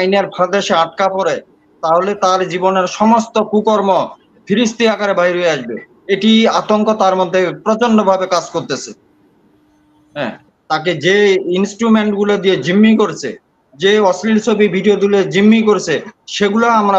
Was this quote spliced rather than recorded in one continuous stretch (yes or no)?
yes